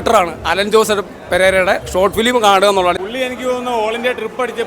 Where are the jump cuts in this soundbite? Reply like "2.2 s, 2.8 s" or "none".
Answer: 3.0 s